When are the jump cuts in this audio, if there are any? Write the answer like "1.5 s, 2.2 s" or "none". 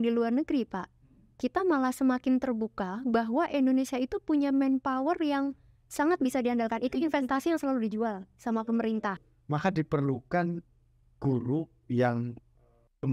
9.3 s